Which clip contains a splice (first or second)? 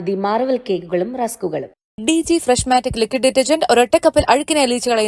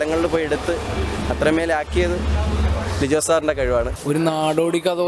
second